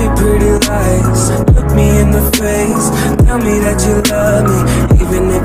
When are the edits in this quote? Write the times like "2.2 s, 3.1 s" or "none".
none